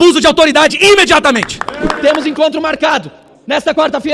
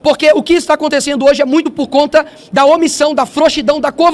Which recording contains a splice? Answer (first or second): first